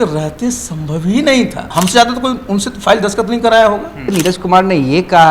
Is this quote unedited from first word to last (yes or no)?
no